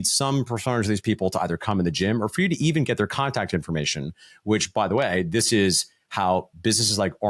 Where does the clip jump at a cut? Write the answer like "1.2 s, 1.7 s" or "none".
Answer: none

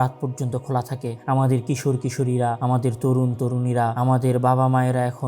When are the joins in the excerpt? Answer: 1.1 s, 2.6 s, 3.9 s

